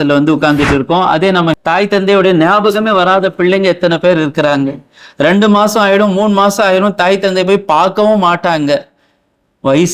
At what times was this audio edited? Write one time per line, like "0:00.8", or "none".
0:01.5